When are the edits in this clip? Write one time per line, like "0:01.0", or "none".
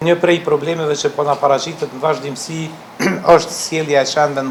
none